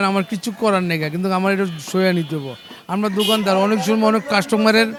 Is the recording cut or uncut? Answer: uncut